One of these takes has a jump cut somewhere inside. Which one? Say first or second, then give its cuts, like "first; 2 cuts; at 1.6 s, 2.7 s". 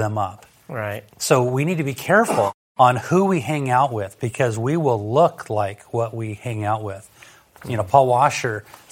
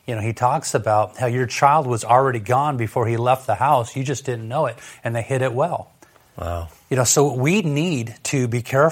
first; 1 cut; at 2.6 s